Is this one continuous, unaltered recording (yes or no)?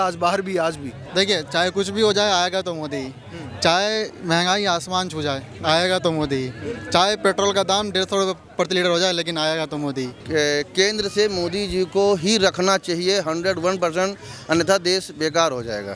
no